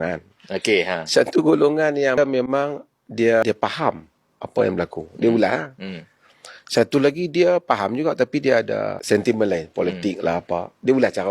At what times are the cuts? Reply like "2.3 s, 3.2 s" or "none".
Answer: 2.2 s, 3.4 s, 9.0 s

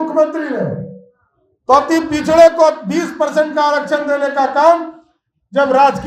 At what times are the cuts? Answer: none

